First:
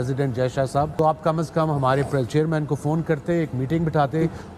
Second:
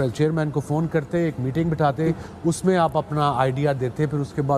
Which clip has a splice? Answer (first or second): first